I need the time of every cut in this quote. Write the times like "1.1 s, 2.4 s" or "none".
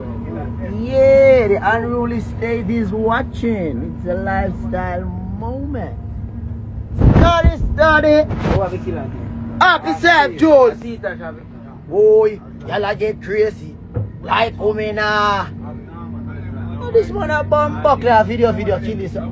none